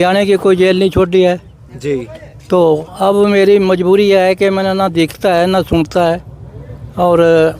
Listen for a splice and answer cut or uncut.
uncut